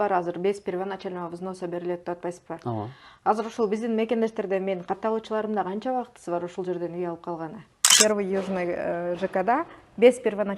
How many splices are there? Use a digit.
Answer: 1